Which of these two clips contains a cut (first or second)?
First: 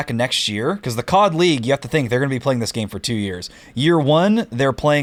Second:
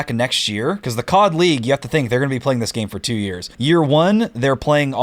second